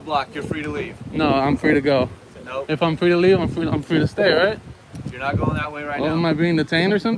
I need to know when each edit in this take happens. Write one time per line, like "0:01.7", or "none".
0:04.6